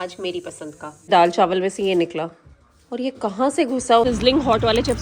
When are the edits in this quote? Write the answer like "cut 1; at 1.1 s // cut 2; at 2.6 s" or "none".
cut 1; at 1.1 s // cut 2; at 4.0 s